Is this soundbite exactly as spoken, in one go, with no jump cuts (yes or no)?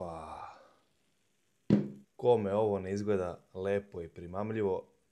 no